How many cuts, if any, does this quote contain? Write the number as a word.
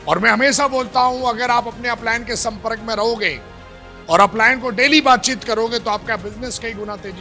zero